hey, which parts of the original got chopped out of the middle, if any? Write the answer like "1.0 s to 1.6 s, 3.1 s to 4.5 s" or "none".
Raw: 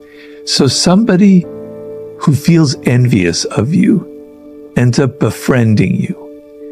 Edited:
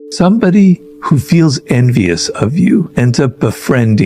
1.6 s to 2.1 s, 4.1 s to 4.7 s